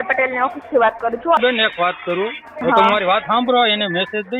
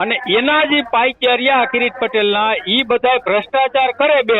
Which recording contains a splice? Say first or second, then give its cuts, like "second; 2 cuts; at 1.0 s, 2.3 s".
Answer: first; 2 cuts; at 1.4 s, 2.5 s